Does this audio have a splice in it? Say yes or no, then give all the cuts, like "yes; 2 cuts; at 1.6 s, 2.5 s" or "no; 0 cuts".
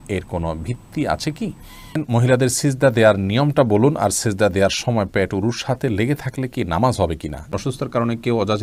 yes; 2 cuts; at 2.0 s, 7.5 s